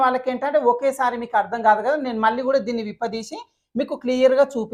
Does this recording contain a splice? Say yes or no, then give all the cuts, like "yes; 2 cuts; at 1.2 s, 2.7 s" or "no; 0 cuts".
no; 0 cuts